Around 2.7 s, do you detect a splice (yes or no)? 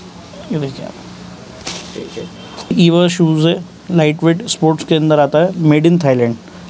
yes